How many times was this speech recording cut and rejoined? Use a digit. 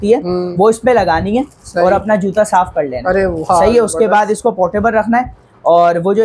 0